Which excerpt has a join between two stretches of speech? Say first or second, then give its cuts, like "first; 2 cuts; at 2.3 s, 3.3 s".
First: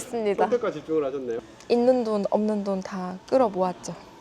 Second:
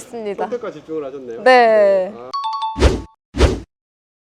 first; 1 cut; at 1.3 s